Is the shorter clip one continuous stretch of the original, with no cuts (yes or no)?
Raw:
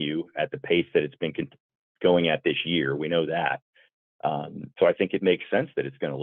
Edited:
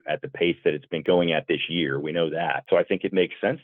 no